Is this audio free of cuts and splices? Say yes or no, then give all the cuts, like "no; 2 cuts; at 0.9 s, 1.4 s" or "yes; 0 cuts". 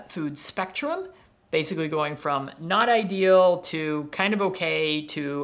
yes; 0 cuts